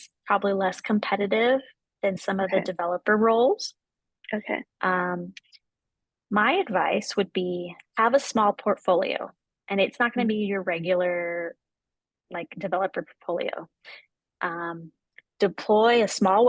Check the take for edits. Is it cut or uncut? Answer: uncut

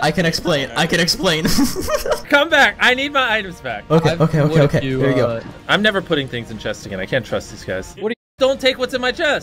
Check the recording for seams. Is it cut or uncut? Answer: cut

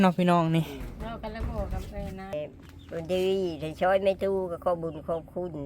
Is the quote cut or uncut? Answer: cut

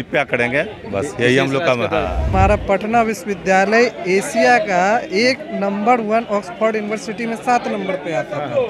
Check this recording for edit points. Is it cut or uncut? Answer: cut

